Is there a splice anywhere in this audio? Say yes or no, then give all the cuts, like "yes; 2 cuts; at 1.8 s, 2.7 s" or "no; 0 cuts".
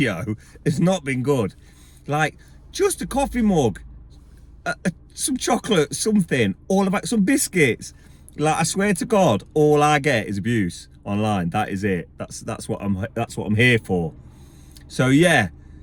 no; 0 cuts